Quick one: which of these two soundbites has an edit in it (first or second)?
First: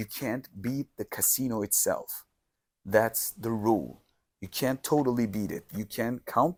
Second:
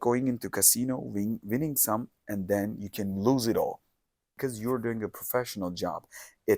second